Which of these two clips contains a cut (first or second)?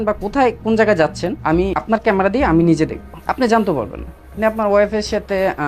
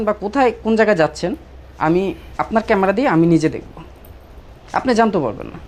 first